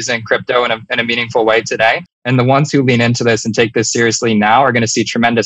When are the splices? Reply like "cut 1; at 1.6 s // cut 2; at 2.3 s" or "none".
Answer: cut 1; at 2.0 s